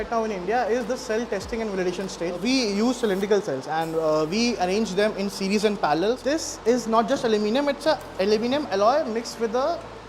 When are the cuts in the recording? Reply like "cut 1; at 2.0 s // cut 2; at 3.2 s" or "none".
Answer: cut 1; at 2.4 s // cut 2; at 6.2 s